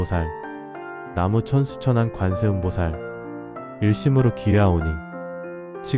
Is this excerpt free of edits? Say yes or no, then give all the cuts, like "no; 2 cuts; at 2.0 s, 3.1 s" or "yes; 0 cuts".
no; 2 cuts; at 0.9 s, 3.4 s